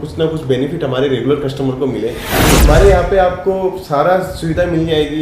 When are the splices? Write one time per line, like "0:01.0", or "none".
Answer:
0:02.6